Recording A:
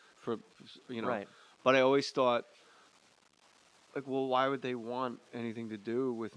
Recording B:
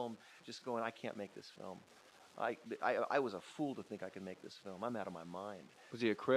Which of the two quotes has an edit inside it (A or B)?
B